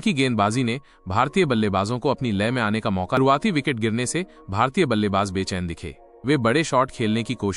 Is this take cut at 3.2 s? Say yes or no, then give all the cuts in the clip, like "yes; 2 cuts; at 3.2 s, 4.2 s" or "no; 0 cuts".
yes; 1 cut; at 3.2 s